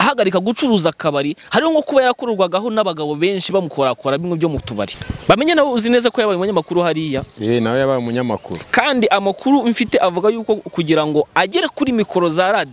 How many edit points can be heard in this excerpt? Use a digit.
1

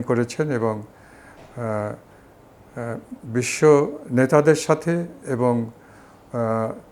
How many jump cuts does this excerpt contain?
0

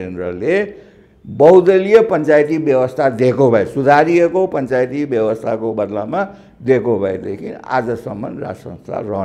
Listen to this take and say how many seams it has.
0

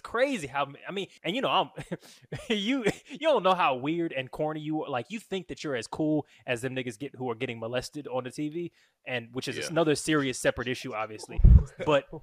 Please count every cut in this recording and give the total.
1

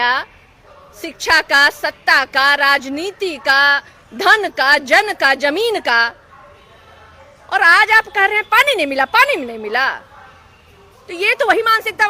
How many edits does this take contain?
0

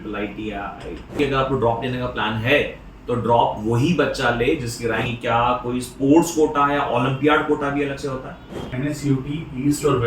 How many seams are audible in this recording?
3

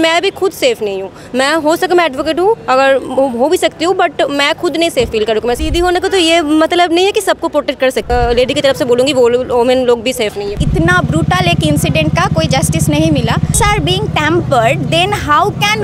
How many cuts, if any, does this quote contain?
4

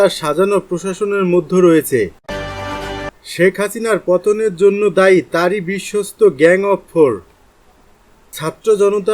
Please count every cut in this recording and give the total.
1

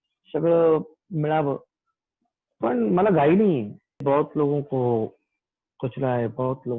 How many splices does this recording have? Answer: 1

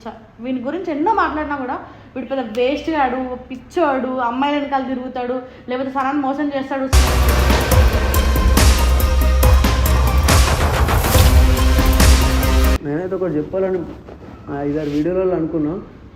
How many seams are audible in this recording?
1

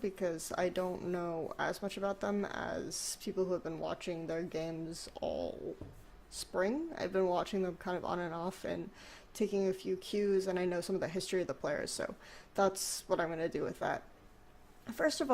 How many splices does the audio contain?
1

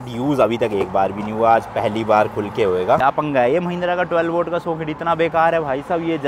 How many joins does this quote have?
1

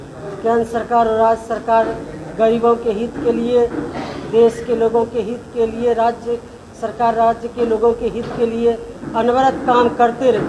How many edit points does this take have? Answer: 0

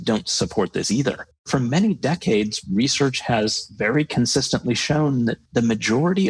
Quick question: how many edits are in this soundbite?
2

